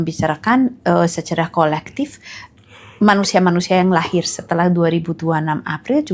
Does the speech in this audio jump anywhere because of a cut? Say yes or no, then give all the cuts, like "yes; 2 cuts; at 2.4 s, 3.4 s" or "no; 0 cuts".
no; 0 cuts